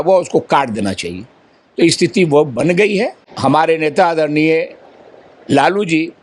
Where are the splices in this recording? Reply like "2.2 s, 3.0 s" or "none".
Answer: 3.2 s